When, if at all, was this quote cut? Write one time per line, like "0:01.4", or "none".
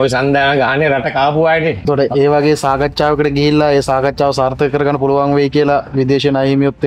0:01.8